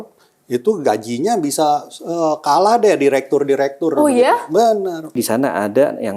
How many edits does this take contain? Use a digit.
1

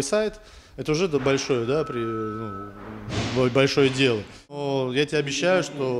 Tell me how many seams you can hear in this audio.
1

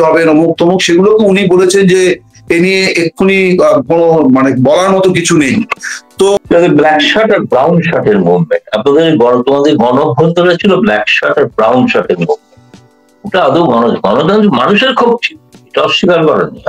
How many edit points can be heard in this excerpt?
1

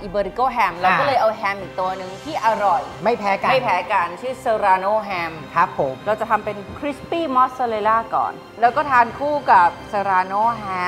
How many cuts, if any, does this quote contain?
2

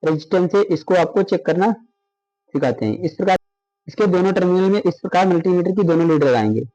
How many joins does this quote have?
1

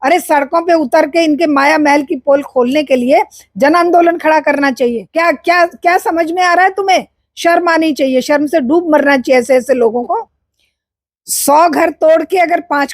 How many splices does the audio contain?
2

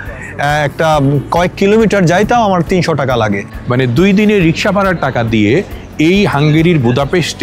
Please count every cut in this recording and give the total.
1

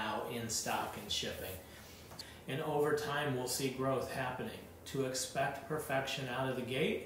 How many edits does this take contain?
1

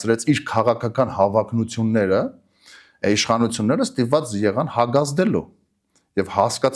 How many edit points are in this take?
0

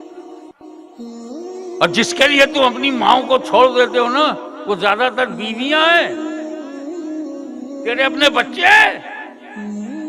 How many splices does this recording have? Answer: 4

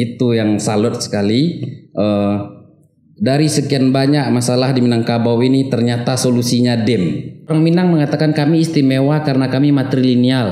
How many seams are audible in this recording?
1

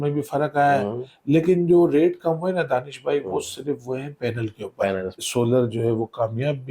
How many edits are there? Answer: 1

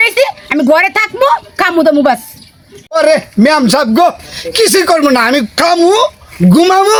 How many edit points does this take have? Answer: 0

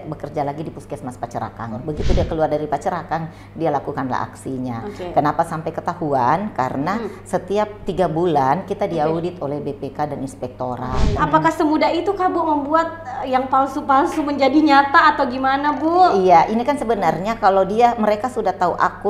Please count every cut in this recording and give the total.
2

